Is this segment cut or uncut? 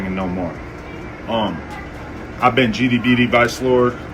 uncut